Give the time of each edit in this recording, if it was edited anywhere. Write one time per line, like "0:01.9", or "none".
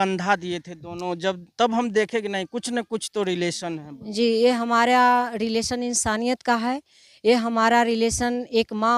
none